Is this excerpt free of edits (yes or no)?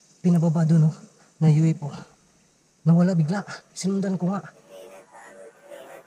no